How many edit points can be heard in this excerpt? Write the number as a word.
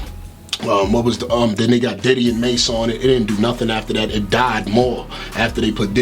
zero